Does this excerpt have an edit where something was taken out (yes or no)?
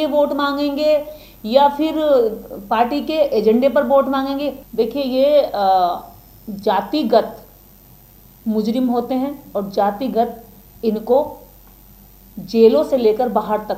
yes